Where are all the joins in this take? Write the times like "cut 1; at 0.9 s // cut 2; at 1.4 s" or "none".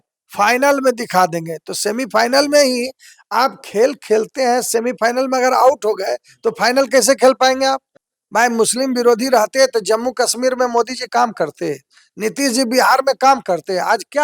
cut 1; at 7.9 s